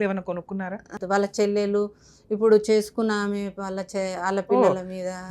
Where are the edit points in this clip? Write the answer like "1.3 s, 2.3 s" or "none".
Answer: 1.0 s